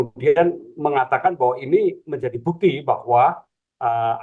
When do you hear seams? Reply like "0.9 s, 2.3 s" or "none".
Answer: none